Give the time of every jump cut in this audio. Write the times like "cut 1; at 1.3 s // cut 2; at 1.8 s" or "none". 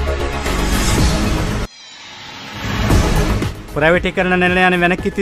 cut 1; at 1.7 s // cut 2; at 3.3 s